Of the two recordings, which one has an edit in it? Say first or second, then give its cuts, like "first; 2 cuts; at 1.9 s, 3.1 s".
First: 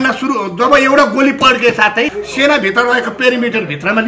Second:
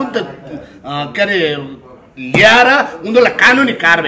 first; 1 cut; at 2.2 s